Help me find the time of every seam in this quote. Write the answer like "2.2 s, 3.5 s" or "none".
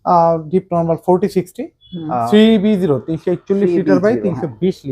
2.2 s

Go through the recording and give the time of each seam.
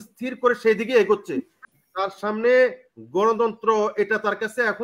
1.5 s

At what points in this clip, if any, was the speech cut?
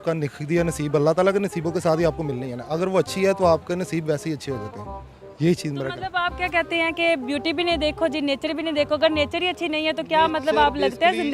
none

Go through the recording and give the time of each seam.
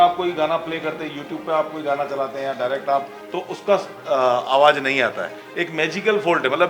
3.2 s

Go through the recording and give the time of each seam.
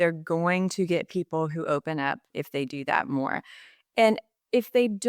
2.4 s

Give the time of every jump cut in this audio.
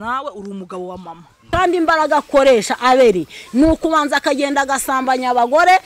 1.5 s

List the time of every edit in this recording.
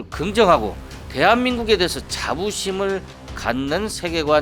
none

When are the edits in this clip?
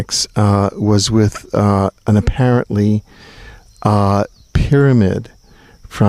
2.8 s

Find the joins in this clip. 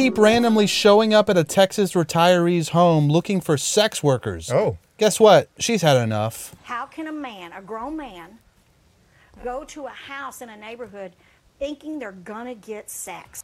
6.5 s

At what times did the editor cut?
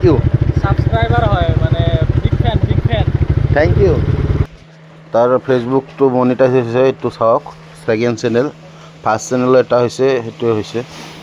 4.4 s

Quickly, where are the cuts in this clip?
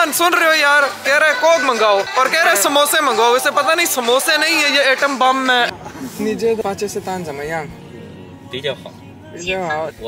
2.1 s, 5.7 s

